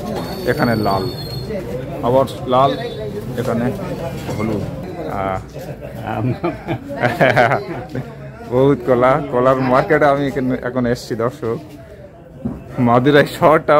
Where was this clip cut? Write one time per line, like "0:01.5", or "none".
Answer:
0:04.8